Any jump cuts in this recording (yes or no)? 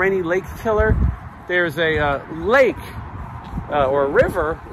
no